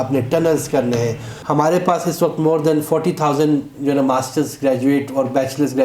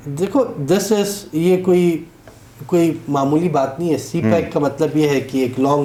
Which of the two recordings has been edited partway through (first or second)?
first